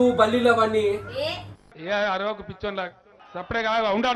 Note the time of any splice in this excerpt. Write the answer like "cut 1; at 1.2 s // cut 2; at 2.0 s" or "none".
cut 1; at 1.4 s